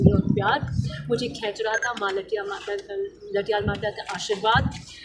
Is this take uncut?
yes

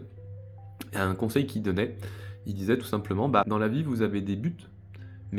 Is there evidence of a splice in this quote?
no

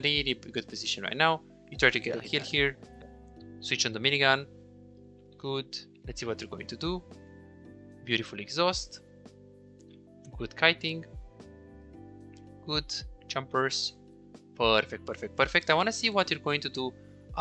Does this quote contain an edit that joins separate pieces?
no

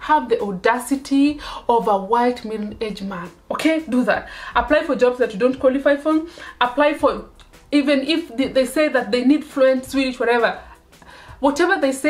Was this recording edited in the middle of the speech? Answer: no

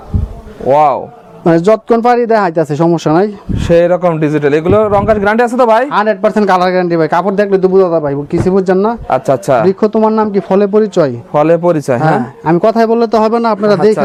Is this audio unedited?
yes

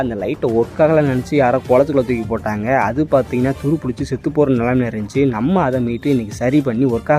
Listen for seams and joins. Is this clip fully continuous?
yes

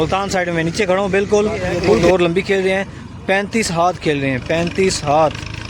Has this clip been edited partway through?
yes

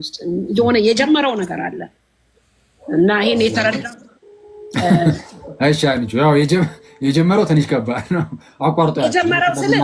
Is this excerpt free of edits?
yes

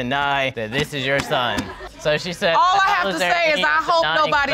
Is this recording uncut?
yes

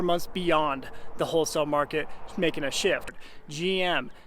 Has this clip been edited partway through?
yes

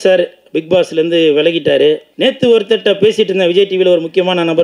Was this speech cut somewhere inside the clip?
yes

